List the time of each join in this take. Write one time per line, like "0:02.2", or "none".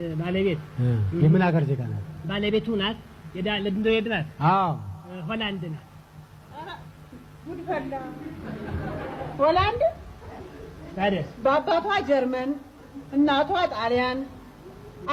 none